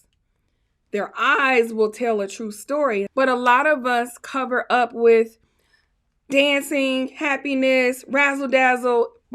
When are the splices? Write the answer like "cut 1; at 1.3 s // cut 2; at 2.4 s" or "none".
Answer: cut 1; at 3.1 s